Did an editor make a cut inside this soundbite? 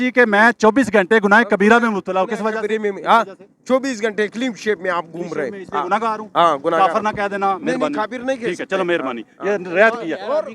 no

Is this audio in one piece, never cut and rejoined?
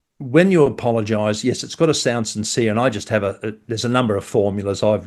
yes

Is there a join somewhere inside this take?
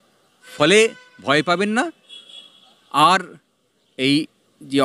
no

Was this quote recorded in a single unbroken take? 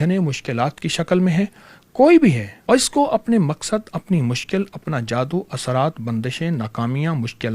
no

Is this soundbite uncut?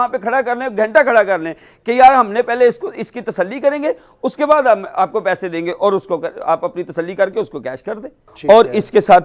no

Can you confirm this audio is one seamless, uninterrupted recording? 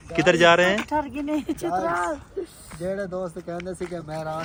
yes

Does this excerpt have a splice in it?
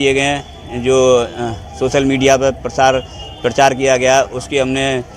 no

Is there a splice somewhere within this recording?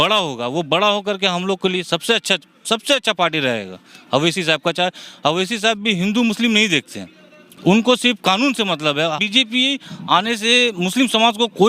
yes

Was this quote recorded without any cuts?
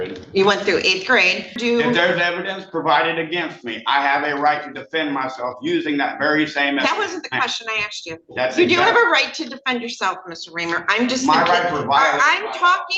no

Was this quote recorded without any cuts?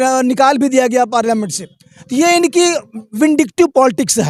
yes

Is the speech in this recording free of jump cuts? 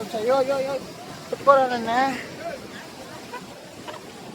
yes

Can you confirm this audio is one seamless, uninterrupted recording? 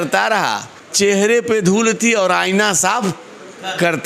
yes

